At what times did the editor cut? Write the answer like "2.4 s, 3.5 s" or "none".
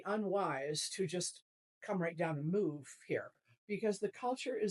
3.4 s